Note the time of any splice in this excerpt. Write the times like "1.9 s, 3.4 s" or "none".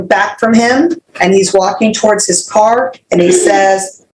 1.1 s